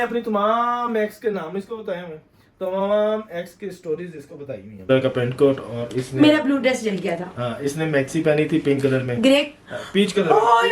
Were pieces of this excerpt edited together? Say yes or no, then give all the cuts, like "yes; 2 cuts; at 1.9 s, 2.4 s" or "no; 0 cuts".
yes; 1 cut; at 4.9 s